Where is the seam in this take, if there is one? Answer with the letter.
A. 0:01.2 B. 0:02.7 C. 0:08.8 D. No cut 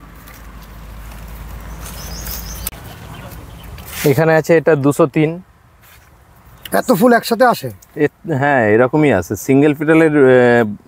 B